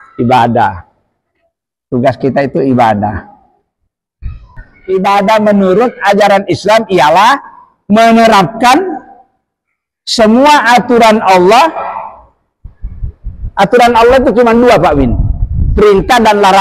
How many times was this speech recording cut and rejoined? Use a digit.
1